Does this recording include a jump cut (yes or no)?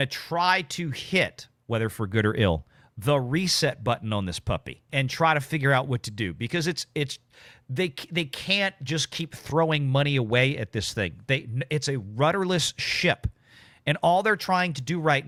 no